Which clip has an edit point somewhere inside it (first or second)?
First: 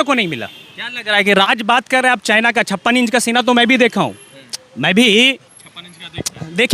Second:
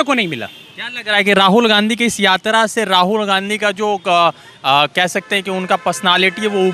first